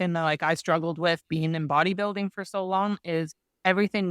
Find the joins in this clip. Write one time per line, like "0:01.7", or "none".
none